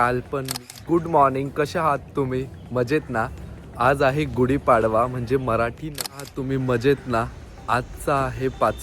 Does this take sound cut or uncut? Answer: cut